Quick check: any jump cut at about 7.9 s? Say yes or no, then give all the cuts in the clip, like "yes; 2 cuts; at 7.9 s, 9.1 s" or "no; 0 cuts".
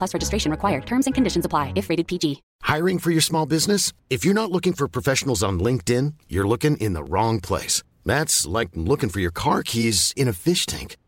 no; 1 cut; at 2.5 s